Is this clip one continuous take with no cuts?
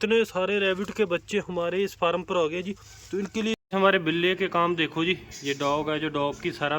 no; 1 cut; at 3.6 s

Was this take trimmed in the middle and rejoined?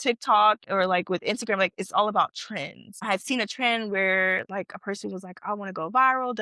yes; 1 cut; at 3.1 s

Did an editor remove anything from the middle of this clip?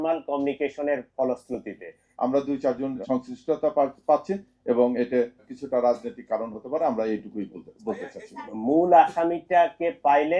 yes; 2 cuts; at 2.0 s, 8.5 s

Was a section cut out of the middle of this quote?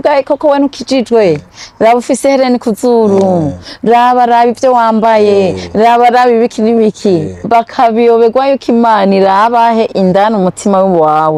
no; 0 cuts

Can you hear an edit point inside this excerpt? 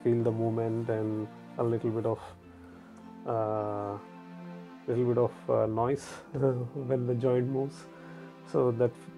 no; 0 cuts

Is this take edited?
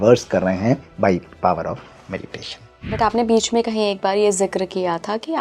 yes; 1 cut; at 2.9 s

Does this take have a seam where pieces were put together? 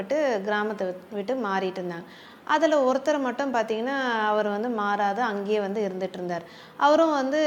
no; 0 cuts

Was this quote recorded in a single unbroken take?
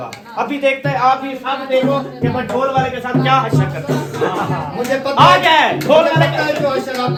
yes; 0 cuts

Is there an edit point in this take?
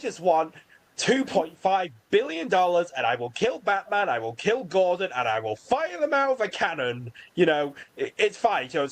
no; 0 cuts

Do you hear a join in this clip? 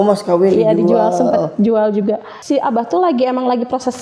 yes; 1 cut; at 2.3 s

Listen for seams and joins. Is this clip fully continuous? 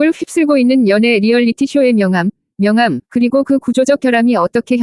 yes; 0 cuts

